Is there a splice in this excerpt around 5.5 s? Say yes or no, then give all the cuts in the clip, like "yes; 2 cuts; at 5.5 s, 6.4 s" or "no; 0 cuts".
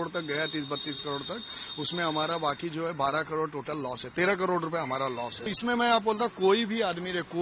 yes; 1 cut; at 5.5 s